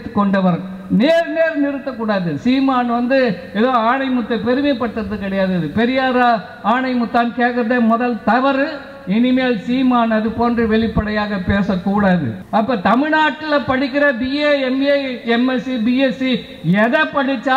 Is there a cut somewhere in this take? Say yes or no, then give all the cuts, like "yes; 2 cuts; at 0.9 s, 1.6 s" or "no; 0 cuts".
yes; 1 cut; at 12.4 s